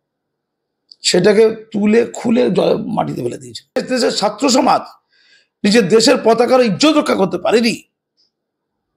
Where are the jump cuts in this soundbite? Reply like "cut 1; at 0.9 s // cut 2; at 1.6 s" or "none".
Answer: cut 1; at 3.8 s